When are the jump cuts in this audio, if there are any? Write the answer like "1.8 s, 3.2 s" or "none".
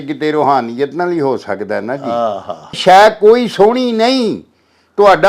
2.8 s